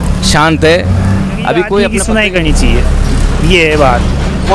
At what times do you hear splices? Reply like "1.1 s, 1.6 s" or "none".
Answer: 1.9 s